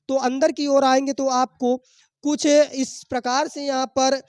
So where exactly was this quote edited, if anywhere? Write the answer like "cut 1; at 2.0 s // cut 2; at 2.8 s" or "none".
none